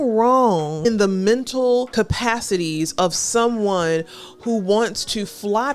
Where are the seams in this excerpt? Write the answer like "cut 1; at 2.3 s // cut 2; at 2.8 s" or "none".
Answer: cut 1; at 0.8 s // cut 2; at 1.9 s